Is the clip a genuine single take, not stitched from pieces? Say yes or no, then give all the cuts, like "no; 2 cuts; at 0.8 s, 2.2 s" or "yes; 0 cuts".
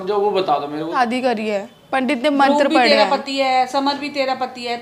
no; 1 cut; at 0.9 s